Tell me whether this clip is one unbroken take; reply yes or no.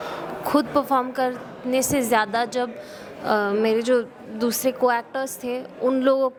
yes